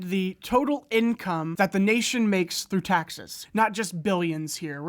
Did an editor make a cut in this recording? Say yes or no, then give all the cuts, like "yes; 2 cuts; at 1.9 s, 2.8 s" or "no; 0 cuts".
yes; 2 cuts; at 1.5 s, 3.4 s